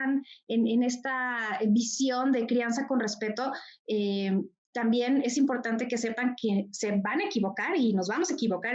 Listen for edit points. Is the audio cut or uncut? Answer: uncut